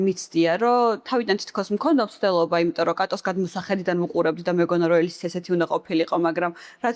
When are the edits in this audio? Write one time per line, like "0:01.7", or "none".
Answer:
none